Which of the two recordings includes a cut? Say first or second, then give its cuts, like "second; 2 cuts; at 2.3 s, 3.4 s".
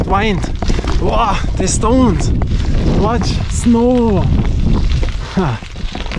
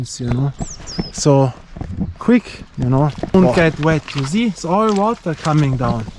second; 1 cut; at 3.3 s